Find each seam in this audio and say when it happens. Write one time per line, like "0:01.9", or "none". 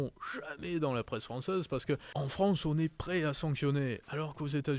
0:02.1